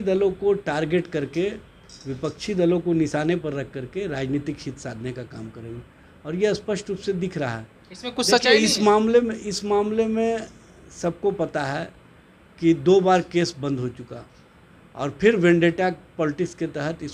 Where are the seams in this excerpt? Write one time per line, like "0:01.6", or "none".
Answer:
none

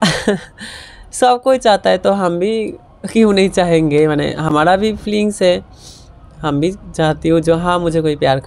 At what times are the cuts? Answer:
none

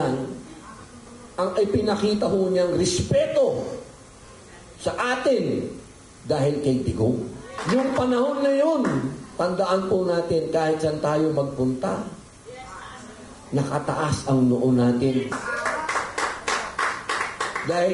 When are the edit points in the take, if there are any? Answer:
0:07.5

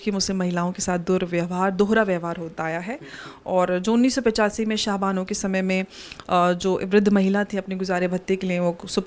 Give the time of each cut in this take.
none

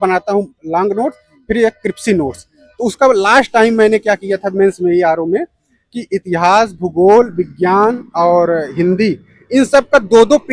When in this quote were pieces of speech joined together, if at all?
none

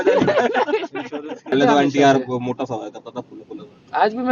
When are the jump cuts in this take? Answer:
0:01.4

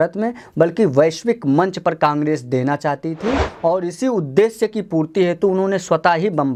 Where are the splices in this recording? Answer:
none

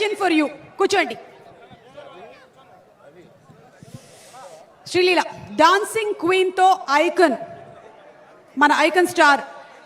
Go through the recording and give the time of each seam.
none

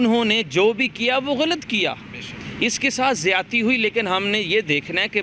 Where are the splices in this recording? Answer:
none

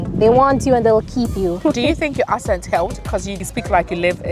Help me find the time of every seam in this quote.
0:01.6
0:03.3

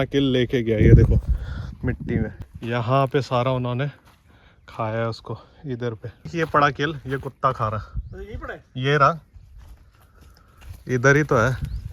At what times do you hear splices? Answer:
0:02.4
0:06.3

